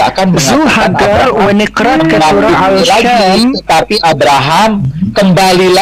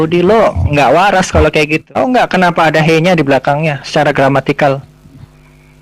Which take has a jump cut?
second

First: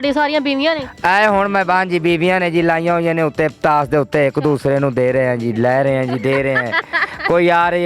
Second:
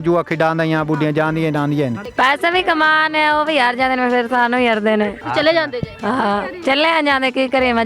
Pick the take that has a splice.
second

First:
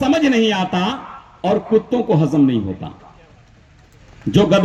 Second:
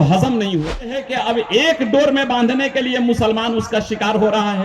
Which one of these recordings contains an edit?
second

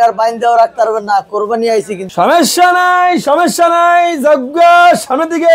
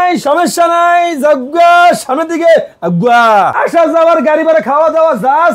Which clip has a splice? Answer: second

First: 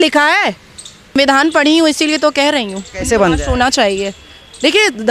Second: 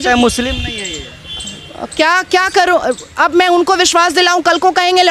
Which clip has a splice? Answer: first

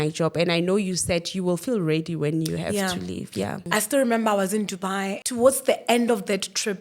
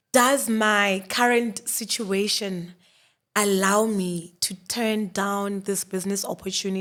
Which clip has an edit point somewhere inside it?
first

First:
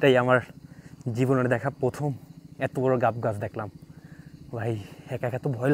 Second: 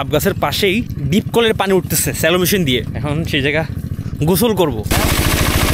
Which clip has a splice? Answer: second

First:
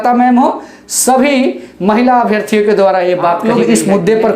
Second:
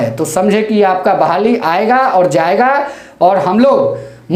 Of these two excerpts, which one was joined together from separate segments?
first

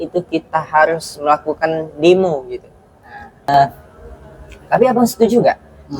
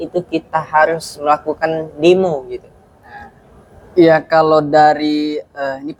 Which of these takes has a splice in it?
first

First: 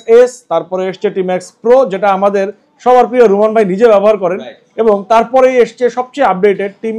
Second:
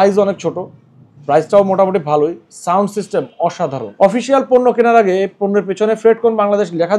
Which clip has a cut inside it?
second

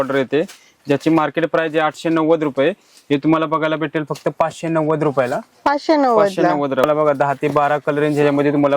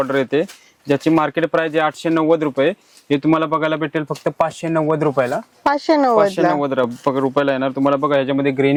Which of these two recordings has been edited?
first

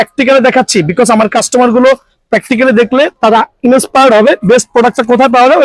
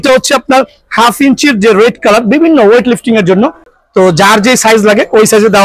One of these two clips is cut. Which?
second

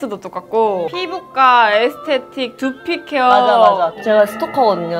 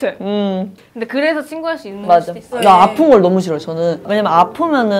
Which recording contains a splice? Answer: second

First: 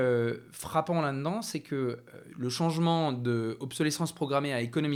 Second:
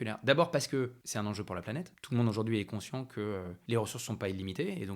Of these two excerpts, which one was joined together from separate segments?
second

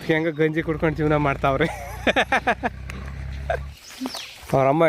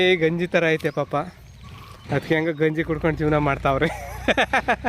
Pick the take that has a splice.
first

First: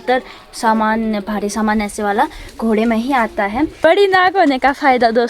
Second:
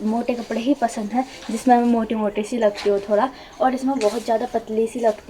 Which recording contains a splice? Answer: first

